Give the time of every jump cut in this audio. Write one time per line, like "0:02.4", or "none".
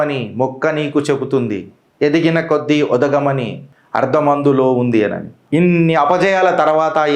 0:05.4